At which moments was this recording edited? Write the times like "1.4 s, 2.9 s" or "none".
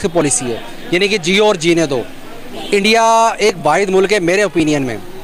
none